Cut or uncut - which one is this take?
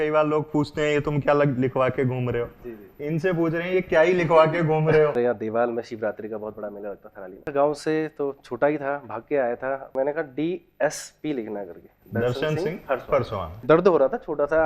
cut